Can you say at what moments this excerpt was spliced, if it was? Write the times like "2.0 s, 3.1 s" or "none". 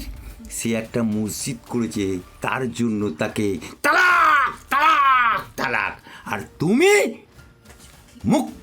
2.3 s